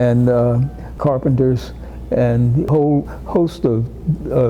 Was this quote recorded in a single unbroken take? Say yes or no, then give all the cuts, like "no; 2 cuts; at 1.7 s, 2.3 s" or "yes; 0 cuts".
no; 2 cuts; at 0.9 s, 2.8 s